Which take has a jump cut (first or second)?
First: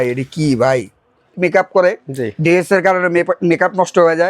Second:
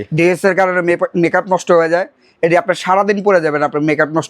first